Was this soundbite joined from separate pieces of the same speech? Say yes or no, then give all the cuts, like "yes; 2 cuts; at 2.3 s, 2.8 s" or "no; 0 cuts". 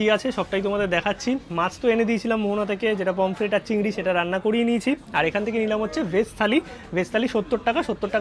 no; 0 cuts